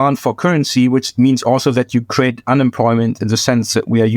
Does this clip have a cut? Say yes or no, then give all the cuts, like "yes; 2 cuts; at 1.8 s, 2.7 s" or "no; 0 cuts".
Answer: no; 0 cuts